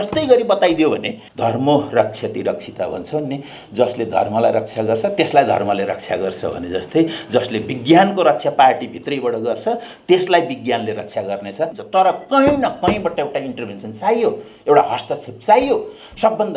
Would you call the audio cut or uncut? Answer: cut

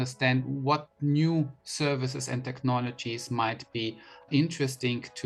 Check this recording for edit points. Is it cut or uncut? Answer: uncut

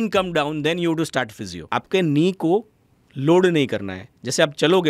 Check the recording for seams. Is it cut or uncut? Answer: cut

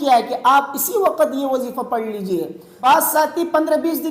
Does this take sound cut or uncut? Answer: cut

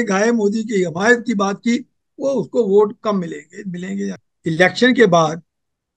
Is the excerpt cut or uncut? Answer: cut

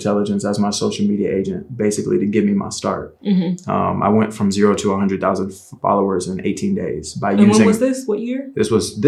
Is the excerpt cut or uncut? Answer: uncut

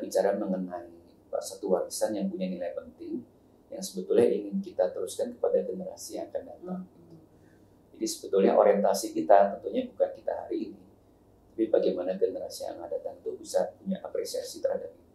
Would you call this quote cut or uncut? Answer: uncut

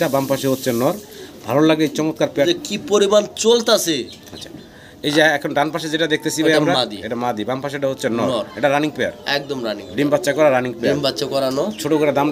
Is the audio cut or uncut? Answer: cut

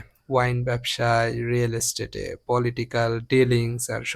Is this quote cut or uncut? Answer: uncut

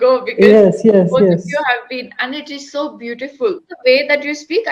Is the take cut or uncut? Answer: cut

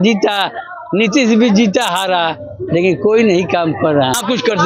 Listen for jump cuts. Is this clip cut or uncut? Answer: uncut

